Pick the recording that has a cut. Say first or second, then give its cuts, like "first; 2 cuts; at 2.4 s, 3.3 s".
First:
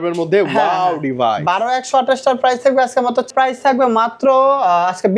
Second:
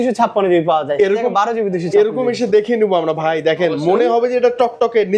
first; 1 cut; at 3.3 s